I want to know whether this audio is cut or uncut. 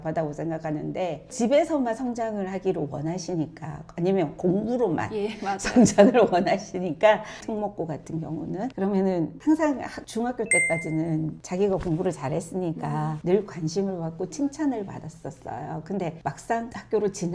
cut